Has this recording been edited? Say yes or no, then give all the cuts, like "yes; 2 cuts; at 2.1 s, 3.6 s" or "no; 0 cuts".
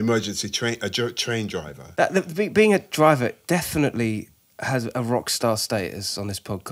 yes; 1 cut; at 1.8 s